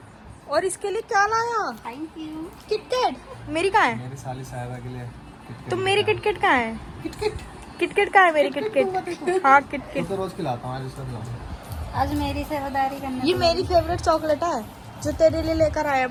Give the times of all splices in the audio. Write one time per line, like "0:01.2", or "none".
none